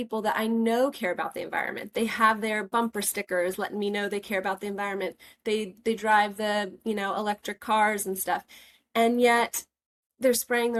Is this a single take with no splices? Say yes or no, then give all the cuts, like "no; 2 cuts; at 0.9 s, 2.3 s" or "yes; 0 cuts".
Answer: yes; 0 cuts